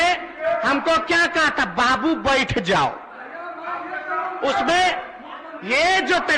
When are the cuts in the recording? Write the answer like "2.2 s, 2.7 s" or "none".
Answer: none

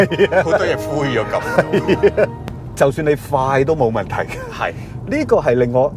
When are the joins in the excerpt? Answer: 2.4 s

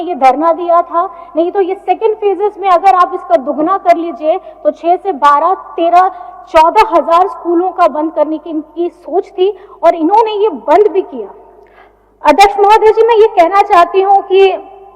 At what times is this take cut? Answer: none

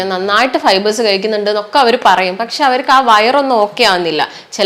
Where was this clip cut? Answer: none

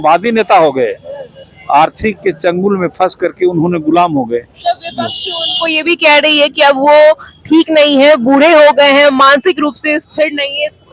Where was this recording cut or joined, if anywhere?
none

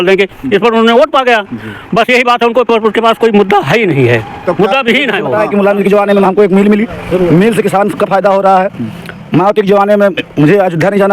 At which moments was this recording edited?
5.3 s

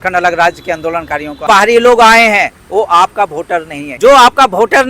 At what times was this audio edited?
1.4 s, 3.8 s

